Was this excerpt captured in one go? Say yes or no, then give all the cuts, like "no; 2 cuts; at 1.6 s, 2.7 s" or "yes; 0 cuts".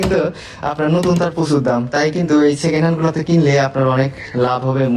yes; 0 cuts